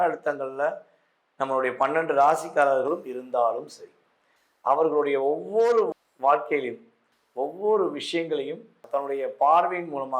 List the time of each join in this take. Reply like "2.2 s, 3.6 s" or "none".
8.8 s